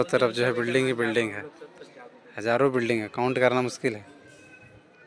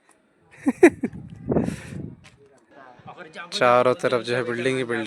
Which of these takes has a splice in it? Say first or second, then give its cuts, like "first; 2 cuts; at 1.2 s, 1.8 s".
second; 1 cut; at 2.8 s